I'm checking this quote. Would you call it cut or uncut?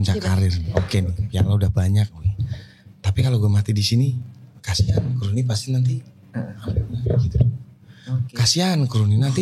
uncut